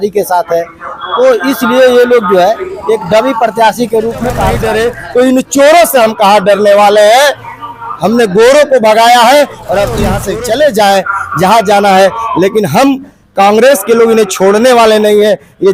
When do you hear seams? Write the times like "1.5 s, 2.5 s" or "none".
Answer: 4.6 s, 10.1 s

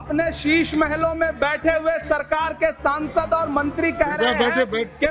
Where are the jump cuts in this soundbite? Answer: none

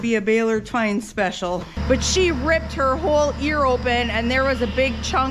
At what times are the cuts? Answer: 1.8 s

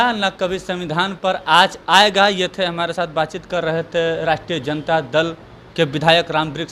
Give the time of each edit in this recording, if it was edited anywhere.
none

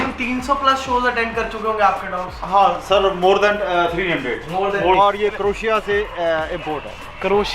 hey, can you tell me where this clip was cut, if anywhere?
4.9 s

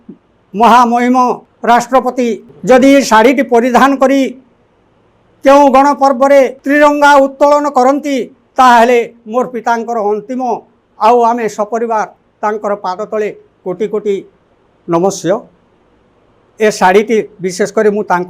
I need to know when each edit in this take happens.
1.5 s, 2.5 s, 6.6 s

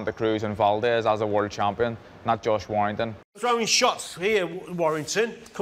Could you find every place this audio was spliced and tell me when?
3.4 s

